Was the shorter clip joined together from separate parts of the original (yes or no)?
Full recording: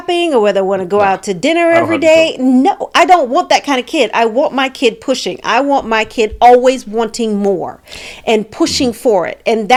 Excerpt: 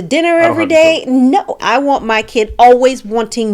yes